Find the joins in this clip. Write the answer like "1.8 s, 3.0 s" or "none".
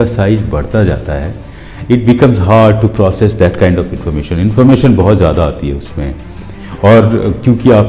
none